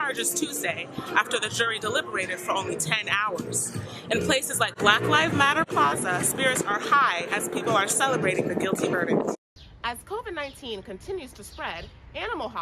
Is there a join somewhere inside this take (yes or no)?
yes